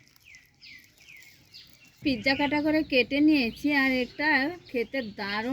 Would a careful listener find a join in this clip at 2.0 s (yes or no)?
yes